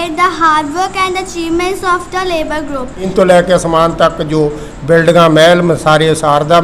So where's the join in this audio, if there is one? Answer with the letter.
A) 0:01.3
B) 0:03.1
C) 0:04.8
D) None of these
B